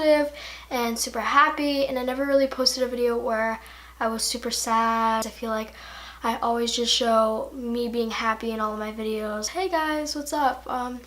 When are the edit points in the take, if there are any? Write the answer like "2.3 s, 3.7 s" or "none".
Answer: 1.9 s

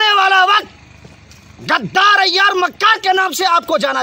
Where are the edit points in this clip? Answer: none

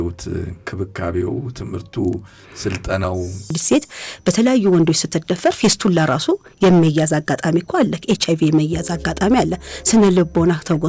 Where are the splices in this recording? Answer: 3.6 s

